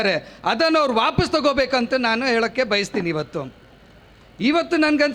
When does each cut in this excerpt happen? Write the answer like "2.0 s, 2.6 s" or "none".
none